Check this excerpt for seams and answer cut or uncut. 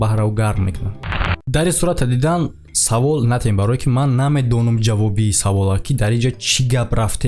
cut